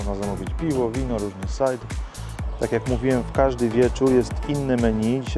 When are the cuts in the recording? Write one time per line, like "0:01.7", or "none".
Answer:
0:02.3